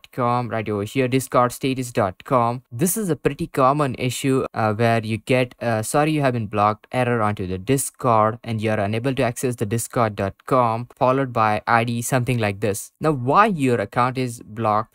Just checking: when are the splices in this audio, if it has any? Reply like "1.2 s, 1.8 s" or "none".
2.6 s